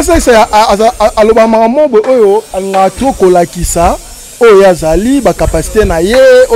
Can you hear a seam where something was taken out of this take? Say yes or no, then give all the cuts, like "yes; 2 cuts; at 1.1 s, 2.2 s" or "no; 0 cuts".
no; 0 cuts